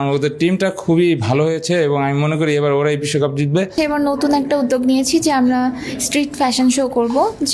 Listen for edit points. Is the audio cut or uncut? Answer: cut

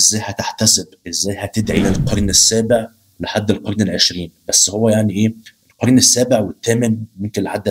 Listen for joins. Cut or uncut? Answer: cut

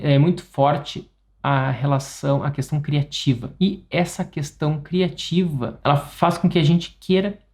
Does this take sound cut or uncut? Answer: cut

